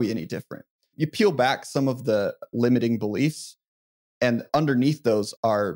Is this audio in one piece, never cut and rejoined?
no; 1 cut; at 4.4 s

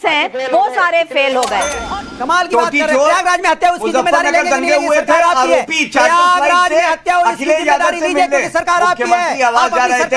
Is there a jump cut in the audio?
yes; 1 cut; at 1.8 s

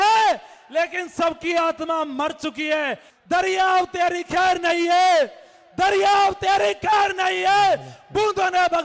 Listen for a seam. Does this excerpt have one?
yes; 1 cut; at 3.1 s

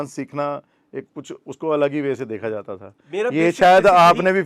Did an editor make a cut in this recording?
no; 0 cuts

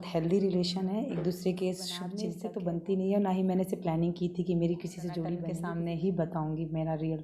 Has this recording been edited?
yes; 2 cuts; at 2.3 s, 5.5 s

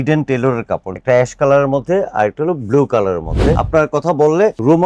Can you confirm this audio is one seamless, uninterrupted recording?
no; 2 cuts; at 0.9 s, 3.6 s

